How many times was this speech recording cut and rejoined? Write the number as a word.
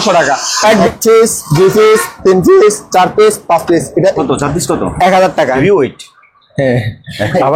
three